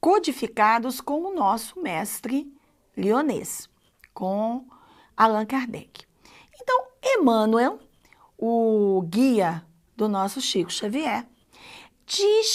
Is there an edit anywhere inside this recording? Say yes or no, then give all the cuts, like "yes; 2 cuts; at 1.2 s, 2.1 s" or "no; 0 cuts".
yes; 1 cut; at 6.6 s